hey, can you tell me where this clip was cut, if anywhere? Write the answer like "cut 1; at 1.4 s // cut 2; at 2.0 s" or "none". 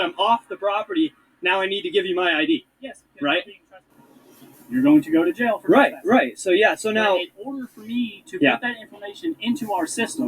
cut 1; at 3.9 s